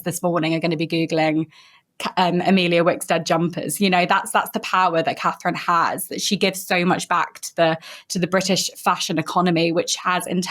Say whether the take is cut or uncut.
uncut